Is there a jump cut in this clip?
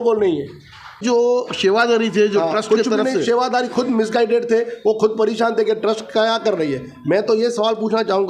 yes; 1 cut; at 1.0 s

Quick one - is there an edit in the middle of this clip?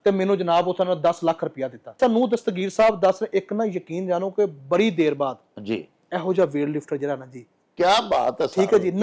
yes; 1 cut; at 2.0 s

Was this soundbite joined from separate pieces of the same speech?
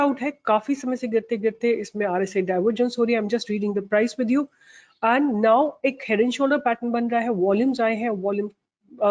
no; 0 cuts

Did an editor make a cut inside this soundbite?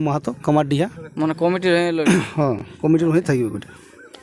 no; 0 cuts

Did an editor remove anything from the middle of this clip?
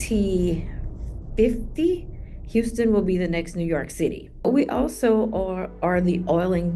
yes; 1 cut; at 4.5 s

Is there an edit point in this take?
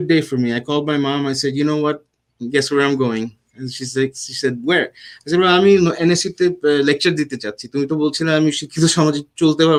no; 0 cuts

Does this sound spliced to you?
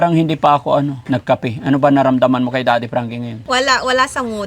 yes; 2 cuts; at 1.0 s, 3.5 s

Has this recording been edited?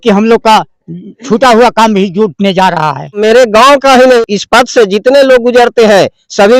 yes; 2 cuts; at 3.2 s, 4.2 s

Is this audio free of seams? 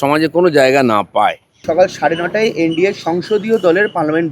no; 1 cut; at 1.5 s

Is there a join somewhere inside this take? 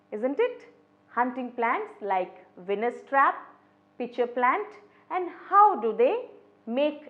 no; 0 cuts

